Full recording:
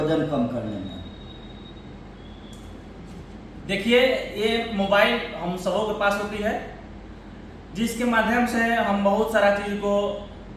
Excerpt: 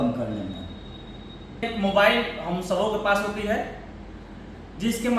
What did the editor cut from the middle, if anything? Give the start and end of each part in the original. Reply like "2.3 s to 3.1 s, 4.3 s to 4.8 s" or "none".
2.0 s to 4.6 s